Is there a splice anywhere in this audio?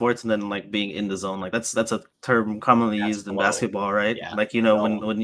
no; 0 cuts

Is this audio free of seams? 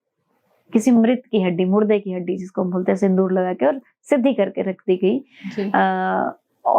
yes; 0 cuts

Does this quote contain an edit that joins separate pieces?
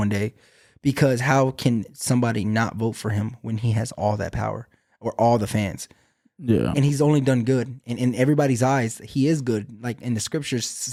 no; 0 cuts

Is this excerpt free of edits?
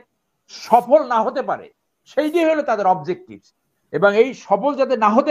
yes; 0 cuts

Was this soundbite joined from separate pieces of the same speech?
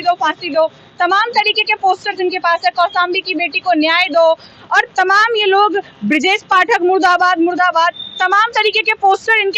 no; 0 cuts

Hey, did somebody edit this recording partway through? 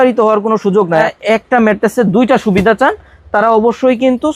yes; 1 cut; at 1.1 s

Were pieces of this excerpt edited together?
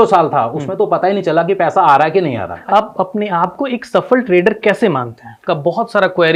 yes; 2 cuts; at 2.6 s, 5.4 s

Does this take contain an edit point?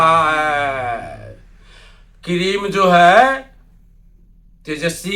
no; 0 cuts

